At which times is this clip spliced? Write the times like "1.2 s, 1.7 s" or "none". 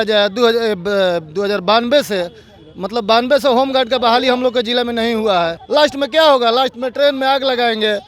5.6 s